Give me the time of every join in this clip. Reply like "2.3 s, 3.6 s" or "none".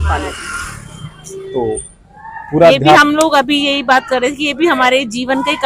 none

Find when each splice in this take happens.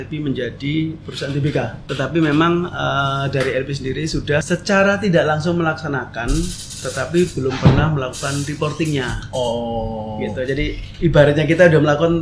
1.8 s, 4.5 s

